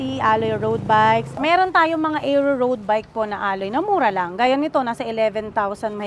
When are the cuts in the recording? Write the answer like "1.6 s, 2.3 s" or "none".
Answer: 1.3 s